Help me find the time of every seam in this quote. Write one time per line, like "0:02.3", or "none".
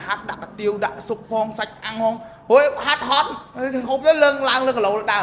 none